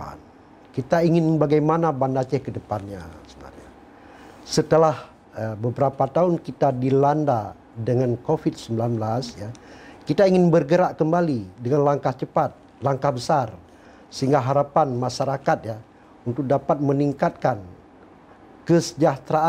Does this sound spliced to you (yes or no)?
no